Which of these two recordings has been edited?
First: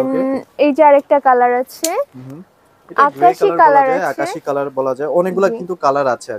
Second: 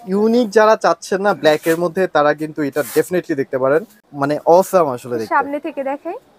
second; 1 cut; at 4.0 s

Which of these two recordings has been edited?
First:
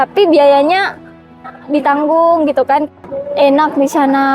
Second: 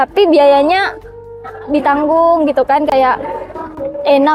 first; 1 cut; at 2.9 s

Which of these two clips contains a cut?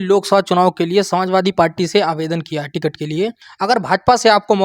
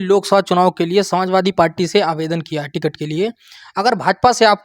first; 1 cut; at 3.4 s

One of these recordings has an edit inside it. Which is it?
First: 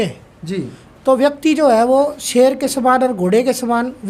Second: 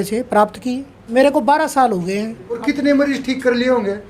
second; 2 cuts; at 0.9 s, 2.6 s

